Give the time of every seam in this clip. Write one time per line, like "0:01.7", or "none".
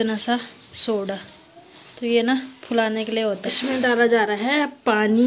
0:03.5